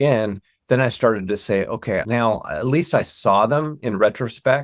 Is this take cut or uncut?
cut